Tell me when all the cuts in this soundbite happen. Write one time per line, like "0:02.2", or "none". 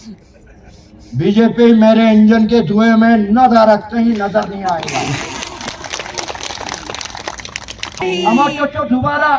0:07.9